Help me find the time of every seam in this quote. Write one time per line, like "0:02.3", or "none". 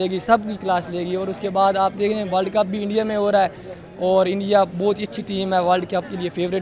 none

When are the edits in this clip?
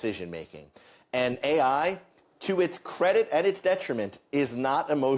none

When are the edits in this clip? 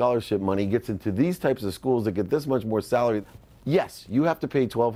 0:03.2

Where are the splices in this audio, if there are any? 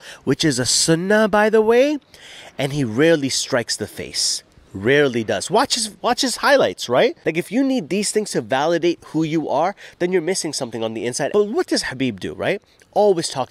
0:07.2
0:11.3

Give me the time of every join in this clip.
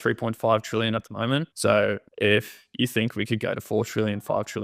0:01.5
0:02.1

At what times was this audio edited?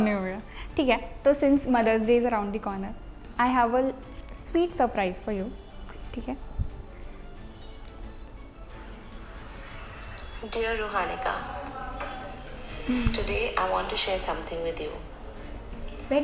none

